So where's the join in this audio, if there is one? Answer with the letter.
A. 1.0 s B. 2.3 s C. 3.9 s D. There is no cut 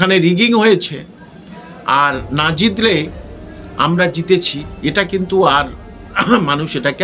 D